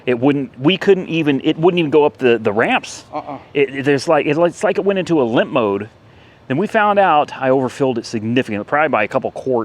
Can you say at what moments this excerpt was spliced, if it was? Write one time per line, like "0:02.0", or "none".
none